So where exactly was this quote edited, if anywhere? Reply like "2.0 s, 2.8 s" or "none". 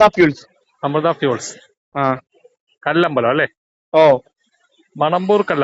none